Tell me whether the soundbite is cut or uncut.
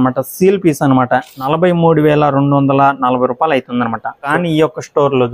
cut